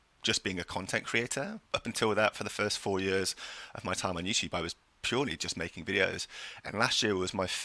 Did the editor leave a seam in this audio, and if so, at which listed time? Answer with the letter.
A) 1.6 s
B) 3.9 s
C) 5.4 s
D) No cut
A